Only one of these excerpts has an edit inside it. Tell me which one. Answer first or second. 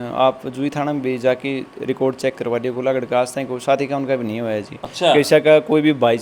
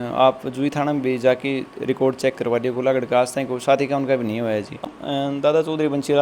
second